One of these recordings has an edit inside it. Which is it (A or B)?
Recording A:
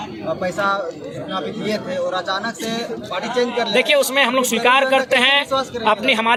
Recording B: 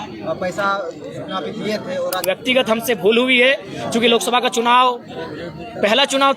B